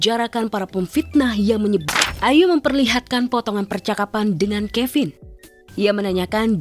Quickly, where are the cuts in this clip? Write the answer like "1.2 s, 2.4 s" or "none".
1.9 s